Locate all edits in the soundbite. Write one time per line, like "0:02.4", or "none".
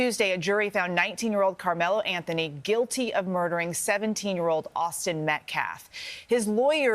none